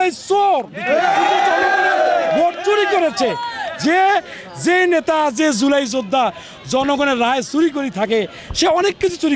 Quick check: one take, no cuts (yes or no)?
yes